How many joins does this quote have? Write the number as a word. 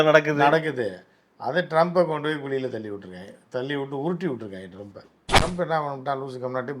one